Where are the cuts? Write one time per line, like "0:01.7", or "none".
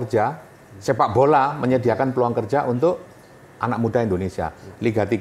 none